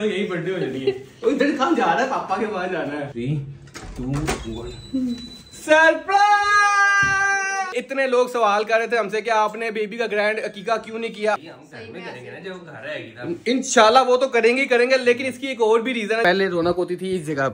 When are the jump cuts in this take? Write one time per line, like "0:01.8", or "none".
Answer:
0:03.1
0:07.7
0:11.3
0:16.2